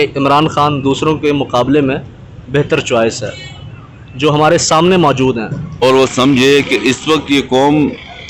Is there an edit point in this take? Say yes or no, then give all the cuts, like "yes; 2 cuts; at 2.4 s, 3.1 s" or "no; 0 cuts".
yes; 1 cut; at 5.8 s